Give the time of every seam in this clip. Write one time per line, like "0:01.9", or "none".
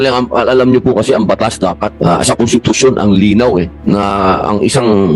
0:01.9
0:03.7